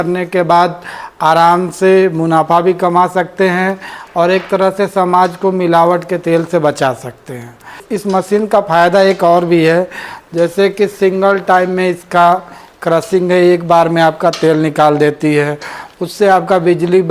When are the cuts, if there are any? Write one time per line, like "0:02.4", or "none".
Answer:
0:07.8

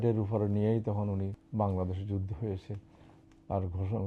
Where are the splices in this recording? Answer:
0:01.4

